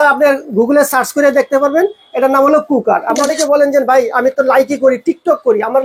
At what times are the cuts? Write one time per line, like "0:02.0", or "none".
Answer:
0:03.2

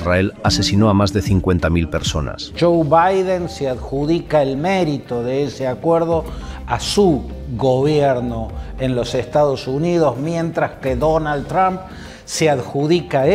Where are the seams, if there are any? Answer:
0:02.4

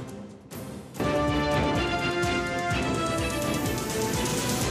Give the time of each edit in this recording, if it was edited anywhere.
0:01.0

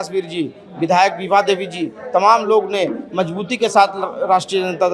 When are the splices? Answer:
none

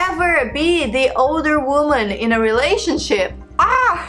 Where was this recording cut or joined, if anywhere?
none

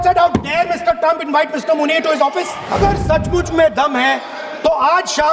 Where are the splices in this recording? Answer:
0:02.6

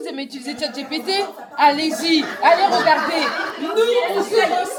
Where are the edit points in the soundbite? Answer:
none

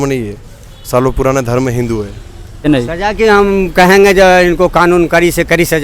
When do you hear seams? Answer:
0:02.7

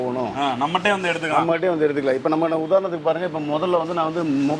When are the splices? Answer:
none

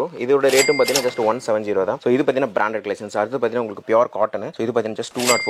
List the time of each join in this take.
0:02.0

